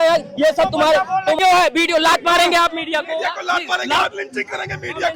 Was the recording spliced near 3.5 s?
no; 1 cut; at 1.4 s

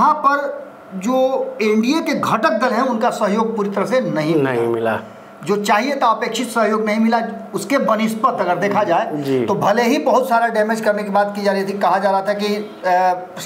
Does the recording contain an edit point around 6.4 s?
no; 0 cuts

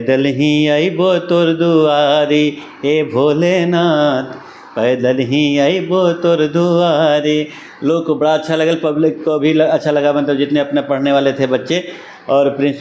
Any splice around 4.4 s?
no; 0 cuts

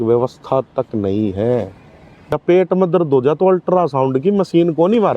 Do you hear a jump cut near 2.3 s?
yes; 1 cut; at 2.3 s

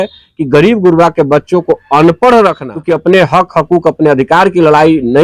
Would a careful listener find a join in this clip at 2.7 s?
yes; 1 cut; at 2.7 s

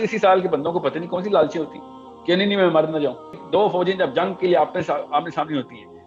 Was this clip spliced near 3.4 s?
yes; 1 cut; at 3.4 s

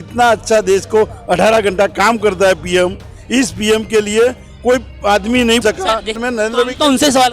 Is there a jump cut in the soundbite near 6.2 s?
yes; 1 cut; at 6.2 s

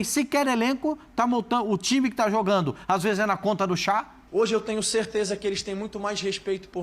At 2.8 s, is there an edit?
no; 1 cut; at 4.2 s

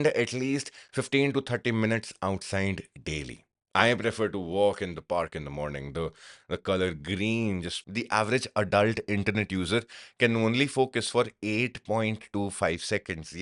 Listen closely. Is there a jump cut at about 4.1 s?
no; 1 cut; at 7.8 s

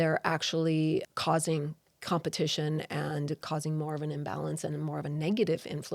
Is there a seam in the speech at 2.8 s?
no; 1 cut; at 1.1 s

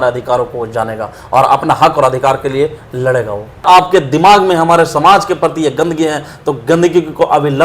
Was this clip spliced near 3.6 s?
yes; 1 cut; at 3.6 s

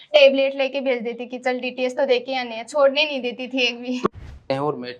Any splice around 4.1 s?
yes; 1 cut; at 4.1 s

